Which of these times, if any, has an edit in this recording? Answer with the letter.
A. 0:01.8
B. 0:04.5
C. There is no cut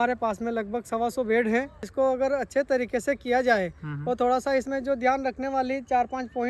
A